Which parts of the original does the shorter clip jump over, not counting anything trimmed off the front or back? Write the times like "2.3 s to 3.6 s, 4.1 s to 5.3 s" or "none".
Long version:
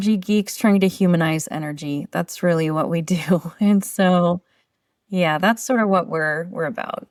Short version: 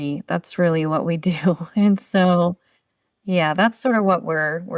none